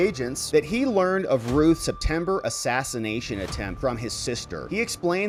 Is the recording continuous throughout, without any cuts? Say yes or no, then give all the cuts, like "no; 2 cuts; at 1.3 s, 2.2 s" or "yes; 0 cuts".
yes; 0 cuts